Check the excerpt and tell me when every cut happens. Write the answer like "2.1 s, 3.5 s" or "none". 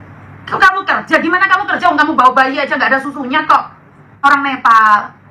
4.2 s